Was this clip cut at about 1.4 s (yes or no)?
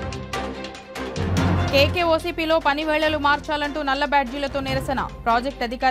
no